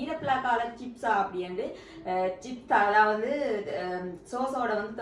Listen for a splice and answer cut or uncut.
uncut